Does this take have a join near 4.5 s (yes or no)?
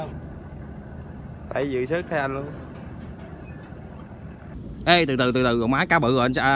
yes